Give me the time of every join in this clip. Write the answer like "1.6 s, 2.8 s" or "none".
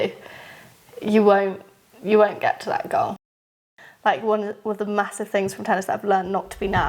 3.3 s

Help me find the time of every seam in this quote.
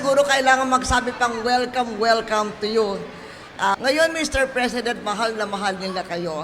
3.8 s

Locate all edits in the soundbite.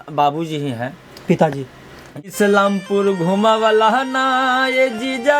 2.3 s

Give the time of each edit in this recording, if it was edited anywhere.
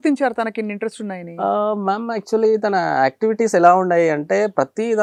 none

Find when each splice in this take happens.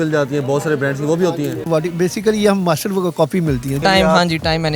1.4 s, 3.8 s

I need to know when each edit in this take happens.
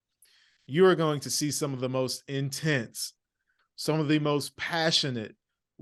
none

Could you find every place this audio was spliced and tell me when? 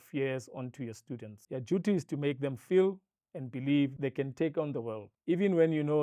1.3 s, 3.9 s, 5.1 s

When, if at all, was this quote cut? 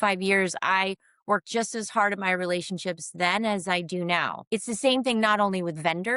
4.4 s

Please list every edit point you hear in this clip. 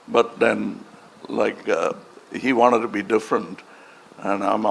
none

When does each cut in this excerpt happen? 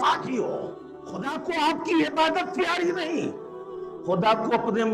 1.3 s

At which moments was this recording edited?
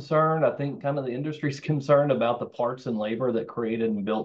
none

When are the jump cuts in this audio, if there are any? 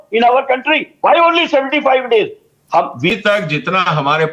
3.1 s

